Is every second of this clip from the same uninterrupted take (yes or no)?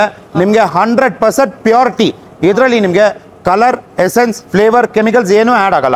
yes